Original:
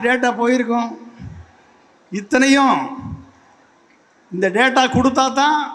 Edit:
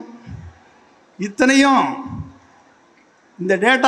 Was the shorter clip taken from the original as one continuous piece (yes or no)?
yes